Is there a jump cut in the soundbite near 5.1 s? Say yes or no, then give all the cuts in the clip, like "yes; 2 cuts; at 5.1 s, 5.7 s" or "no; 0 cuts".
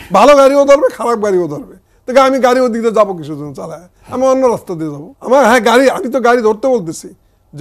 yes; 1 cut; at 5.1 s